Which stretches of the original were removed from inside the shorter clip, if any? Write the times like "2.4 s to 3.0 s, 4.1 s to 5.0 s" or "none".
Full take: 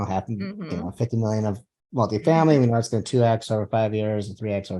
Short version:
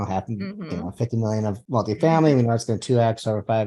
1.6 s to 1.9 s